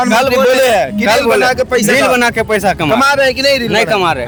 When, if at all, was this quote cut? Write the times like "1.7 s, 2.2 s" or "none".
none